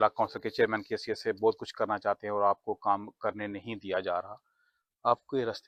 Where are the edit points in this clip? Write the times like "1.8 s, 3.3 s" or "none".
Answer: none

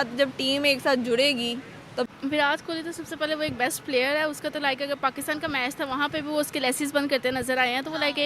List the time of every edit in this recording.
2.1 s

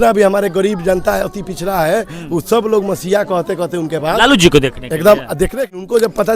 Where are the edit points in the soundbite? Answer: 5.4 s

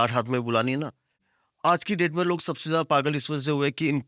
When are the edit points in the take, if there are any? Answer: 1.1 s

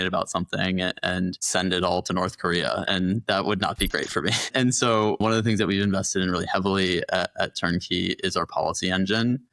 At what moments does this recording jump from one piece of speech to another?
5.2 s

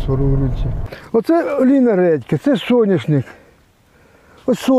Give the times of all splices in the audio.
0.9 s

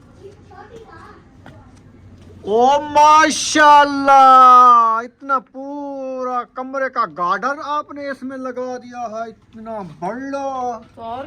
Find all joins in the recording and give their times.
none

